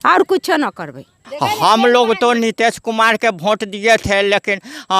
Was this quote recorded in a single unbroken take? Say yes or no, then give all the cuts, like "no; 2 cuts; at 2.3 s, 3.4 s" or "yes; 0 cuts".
no; 1 cut; at 1.0 s